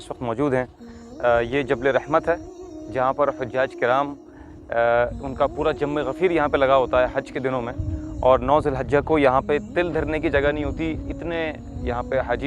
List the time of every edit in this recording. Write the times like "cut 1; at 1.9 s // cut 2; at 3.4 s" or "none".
none